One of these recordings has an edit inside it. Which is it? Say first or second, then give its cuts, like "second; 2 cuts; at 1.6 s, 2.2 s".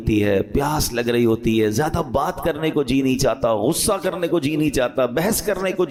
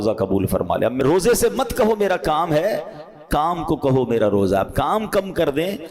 second; 1 cut; at 1.0 s